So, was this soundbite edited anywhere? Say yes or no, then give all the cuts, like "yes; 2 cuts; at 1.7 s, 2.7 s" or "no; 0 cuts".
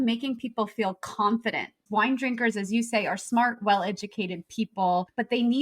yes; 1 cut; at 1.8 s